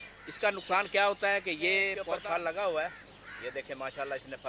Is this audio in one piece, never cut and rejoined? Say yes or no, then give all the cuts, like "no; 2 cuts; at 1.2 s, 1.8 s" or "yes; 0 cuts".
no; 1 cut; at 2.0 s